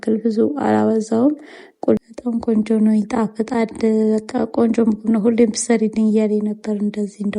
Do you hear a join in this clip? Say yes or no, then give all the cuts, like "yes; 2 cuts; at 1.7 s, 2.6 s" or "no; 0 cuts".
yes; 1 cut; at 2.0 s